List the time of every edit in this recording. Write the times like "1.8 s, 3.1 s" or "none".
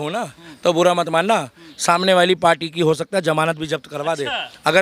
none